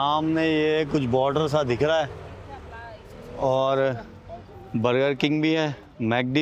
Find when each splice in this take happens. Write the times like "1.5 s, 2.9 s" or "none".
none